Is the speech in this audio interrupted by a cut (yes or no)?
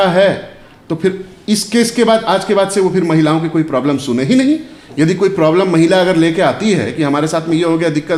no